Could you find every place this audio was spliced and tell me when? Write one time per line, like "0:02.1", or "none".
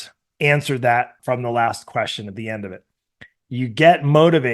0:01.2